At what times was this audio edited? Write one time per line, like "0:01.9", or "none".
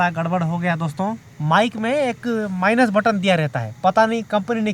0:01.3